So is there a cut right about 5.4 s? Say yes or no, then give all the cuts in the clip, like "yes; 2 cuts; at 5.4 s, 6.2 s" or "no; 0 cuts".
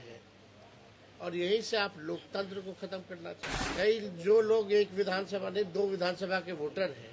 no; 1 cut; at 3.5 s